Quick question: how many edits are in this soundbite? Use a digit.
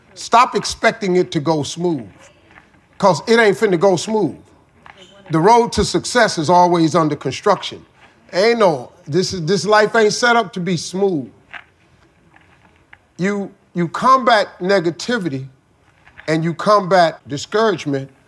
1